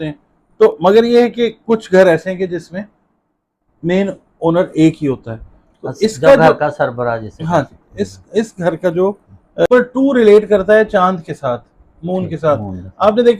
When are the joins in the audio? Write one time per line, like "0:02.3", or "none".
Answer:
0:09.7

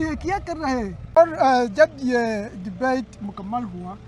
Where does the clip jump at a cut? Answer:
0:01.2

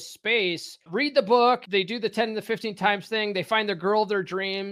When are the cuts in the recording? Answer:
0:00.9
0:01.6

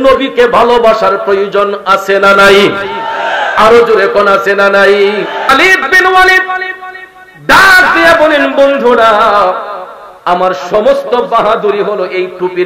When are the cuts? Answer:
0:05.5

